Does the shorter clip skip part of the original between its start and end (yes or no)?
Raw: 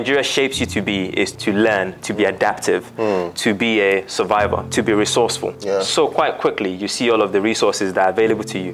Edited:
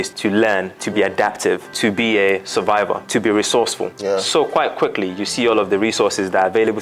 yes